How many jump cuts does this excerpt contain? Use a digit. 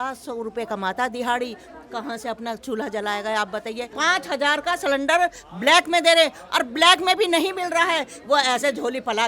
1